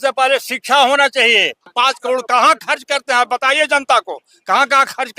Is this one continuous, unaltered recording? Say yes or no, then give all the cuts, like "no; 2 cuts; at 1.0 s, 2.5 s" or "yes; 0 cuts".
no; 1 cut; at 1.7 s